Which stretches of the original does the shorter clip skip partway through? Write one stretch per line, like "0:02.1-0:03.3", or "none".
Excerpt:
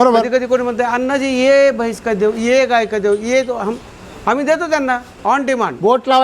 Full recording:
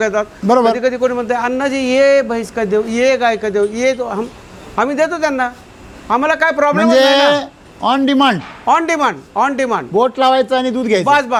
0:05.6-0:09.2